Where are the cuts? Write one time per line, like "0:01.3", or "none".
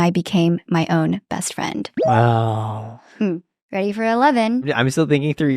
0:03.6
0:04.7

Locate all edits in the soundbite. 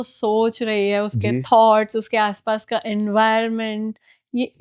none

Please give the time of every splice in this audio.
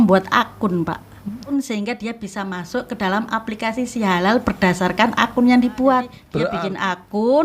0:01.4
0:06.5

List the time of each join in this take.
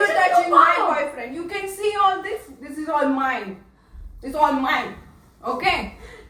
none

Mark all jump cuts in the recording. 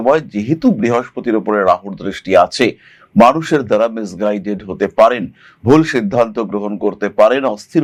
none

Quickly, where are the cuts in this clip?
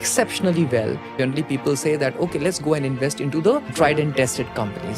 0:01.1
0:03.7

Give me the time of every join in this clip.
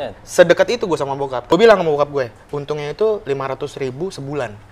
0:01.5

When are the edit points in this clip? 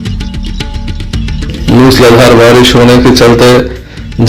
0:01.5

